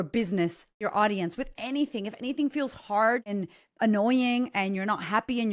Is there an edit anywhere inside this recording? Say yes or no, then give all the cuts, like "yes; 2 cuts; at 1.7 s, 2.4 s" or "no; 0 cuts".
yes; 2 cuts; at 0.8 s, 3.5 s